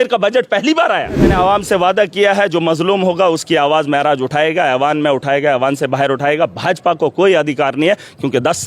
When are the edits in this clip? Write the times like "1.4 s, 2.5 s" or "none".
1.3 s